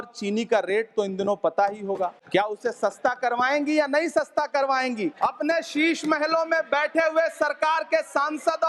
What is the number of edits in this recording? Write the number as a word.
two